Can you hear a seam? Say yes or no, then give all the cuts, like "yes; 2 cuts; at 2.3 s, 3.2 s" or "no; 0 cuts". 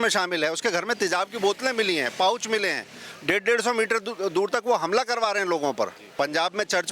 yes; 1 cut; at 6.0 s